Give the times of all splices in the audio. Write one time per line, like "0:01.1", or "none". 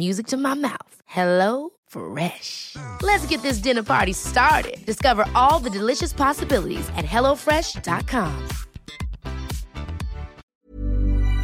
0:10.4